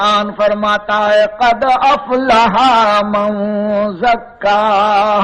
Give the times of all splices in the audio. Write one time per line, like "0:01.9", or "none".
none